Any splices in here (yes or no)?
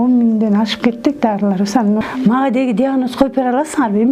yes